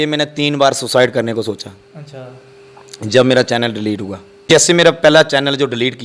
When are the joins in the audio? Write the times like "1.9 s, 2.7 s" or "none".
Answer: 4.5 s